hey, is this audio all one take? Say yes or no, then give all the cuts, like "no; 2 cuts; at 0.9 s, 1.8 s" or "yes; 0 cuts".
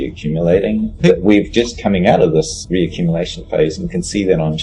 no; 1 cut; at 2.6 s